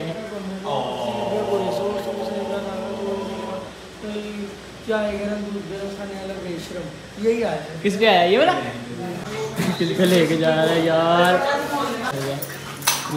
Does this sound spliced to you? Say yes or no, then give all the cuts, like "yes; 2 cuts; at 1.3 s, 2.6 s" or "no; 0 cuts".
yes; 2 cuts; at 9.2 s, 12.1 s